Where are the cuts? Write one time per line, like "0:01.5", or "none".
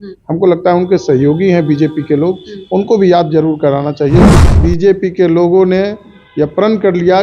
0:04.3